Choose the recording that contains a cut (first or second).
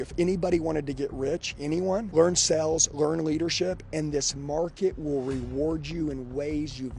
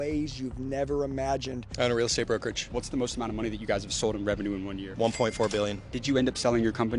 second